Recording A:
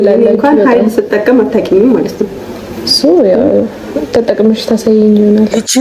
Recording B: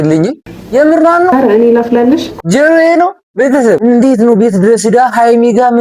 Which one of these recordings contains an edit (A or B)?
B